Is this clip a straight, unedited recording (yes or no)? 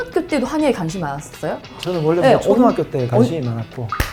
yes